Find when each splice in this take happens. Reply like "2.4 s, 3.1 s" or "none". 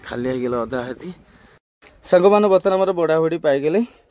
1.8 s